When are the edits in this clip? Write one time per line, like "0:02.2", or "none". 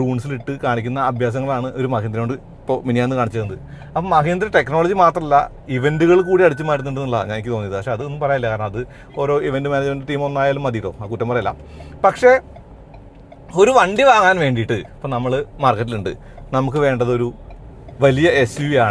none